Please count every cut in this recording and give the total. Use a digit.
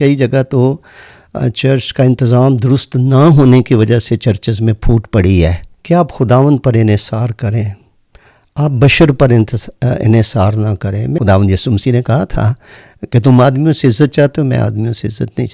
2